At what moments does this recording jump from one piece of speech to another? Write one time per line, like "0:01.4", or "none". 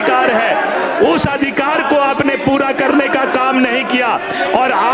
none

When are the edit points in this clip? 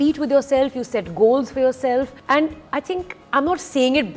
none

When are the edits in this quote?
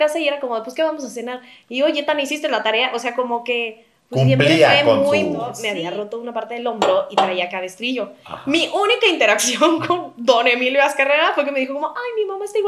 0:05.6

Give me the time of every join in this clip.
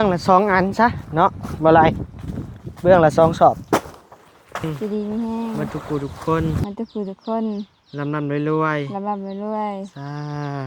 0:04.6

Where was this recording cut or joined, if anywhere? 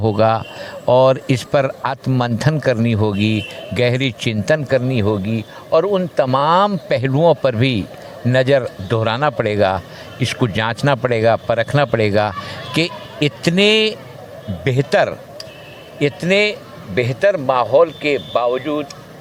none

